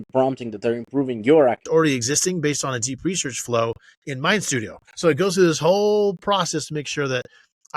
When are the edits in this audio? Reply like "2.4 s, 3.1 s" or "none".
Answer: 1.6 s